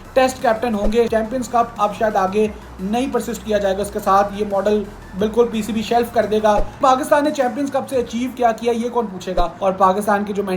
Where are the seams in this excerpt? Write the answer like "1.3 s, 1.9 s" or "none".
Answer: 1.1 s, 6.8 s, 9.5 s